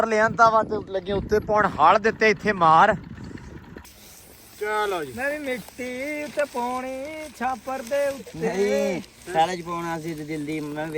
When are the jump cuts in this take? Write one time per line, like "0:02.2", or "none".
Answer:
0:03.9

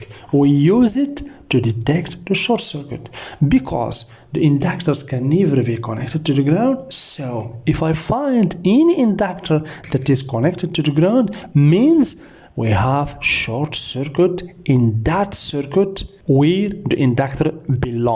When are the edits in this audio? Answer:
0:16.1

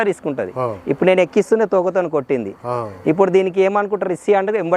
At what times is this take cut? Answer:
none

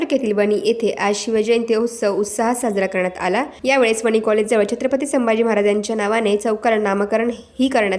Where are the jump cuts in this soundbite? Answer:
0:03.5

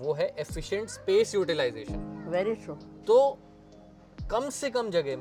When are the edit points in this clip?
none

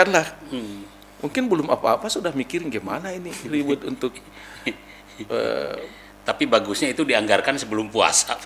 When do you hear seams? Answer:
none

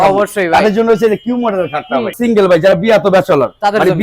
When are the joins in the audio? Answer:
0:02.1

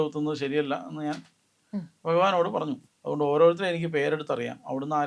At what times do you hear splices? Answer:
0:02.8

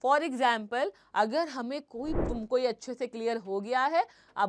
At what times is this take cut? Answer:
0:02.2

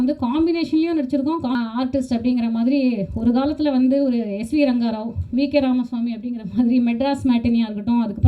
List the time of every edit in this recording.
0:01.6

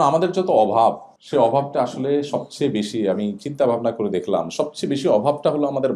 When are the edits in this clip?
0:01.1

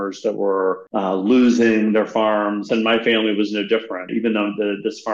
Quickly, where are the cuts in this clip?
0:00.8
0:02.7
0:04.1

